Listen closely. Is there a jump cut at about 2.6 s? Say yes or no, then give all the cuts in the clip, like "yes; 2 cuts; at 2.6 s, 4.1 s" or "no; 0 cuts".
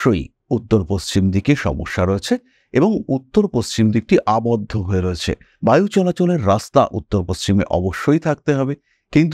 no; 0 cuts